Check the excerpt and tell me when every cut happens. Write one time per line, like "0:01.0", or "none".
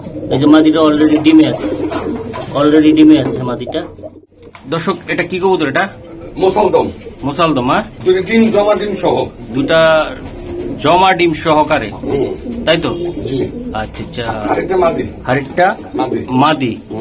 0:04.0